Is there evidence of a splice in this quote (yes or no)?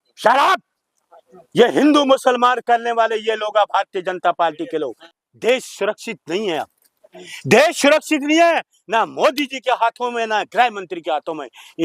yes